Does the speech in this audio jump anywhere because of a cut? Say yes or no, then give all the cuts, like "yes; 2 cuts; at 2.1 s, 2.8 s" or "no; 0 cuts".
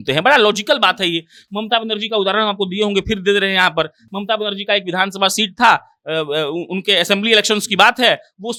no; 0 cuts